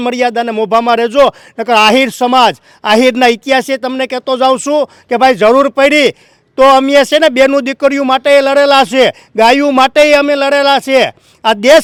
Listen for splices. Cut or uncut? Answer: uncut